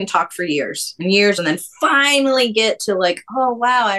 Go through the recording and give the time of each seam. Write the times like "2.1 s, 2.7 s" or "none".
1.4 s